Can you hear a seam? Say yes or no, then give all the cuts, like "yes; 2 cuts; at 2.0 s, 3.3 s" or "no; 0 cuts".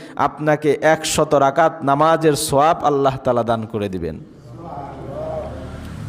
no; 0 cuts